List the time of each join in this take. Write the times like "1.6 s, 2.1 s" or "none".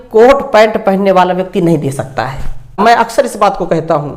2.8 s